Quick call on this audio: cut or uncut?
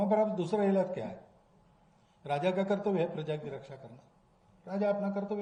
uncut